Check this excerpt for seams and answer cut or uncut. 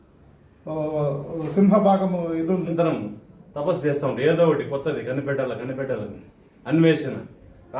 cut